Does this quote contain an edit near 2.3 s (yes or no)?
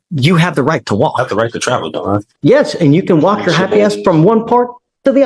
yes